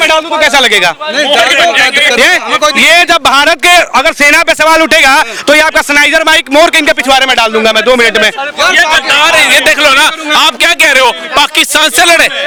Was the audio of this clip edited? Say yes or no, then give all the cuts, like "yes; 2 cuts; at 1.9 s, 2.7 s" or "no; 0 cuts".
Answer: no; 0 cuts